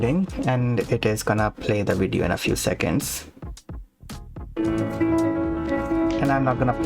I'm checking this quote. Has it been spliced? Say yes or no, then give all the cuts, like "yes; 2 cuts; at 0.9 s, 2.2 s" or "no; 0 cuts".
yes; 2 cuts; at 3.0 s, 4.5 s